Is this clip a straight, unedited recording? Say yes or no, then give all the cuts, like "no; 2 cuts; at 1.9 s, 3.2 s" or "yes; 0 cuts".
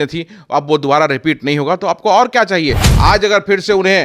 no; 1 cut; at 2.9 s